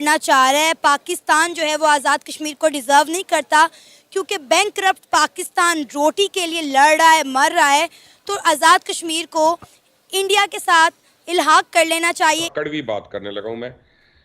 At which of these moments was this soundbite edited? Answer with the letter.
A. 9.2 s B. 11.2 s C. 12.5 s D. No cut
C